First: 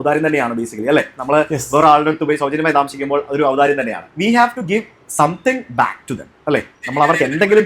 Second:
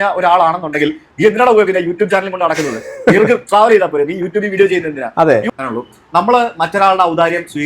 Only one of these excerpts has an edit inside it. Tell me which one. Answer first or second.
second